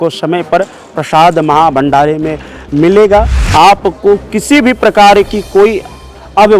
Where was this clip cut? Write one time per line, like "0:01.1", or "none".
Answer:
0:03.4